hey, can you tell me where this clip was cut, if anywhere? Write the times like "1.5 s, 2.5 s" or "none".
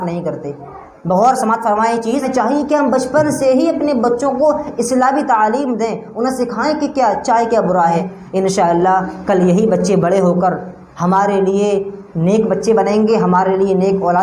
2.3 s, 8.1 s